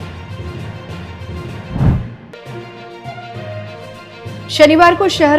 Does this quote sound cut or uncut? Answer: cut